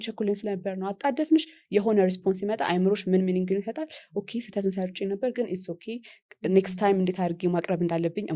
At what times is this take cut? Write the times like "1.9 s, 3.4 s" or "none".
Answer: none